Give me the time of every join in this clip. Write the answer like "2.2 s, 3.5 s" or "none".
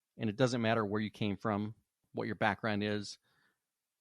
2.0 s